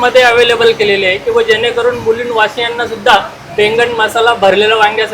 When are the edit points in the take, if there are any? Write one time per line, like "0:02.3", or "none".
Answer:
none